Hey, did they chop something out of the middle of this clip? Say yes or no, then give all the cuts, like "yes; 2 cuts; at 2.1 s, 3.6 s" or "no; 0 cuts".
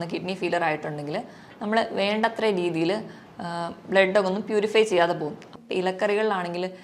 yes; 1 cut; at 5.5 s